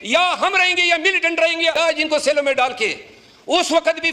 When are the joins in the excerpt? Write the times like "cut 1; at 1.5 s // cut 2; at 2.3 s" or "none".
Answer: cut 1; at 1.7 s